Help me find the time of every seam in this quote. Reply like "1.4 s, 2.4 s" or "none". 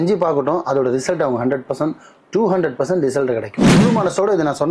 3.6 s